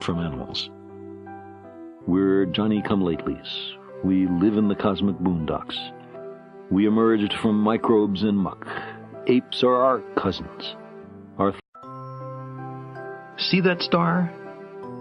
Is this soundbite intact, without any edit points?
yes; 0 cuts

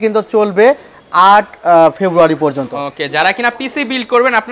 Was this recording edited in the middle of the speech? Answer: no; 0 cuts

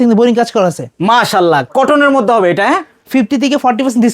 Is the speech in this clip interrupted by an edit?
yes; 1 cut; at 2.9 s

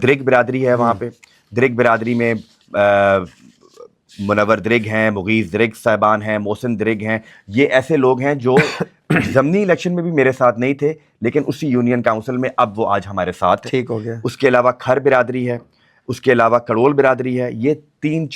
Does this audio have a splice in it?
no; 0 cuts

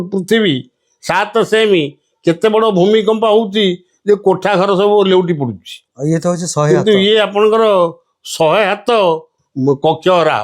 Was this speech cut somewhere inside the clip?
yes; 2 cuts; at 5.8 s, 9.4 s

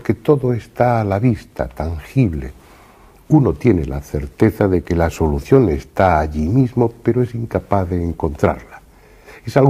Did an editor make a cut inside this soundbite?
yes; 1 cut; at 1.1 s

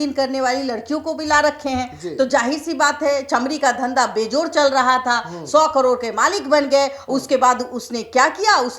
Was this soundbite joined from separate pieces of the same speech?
no; 0 cuts

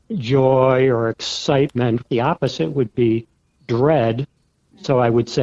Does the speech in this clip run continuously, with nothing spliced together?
no; 1 cut; at 2.0 s

